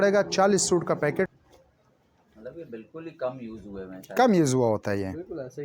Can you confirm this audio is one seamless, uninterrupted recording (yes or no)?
no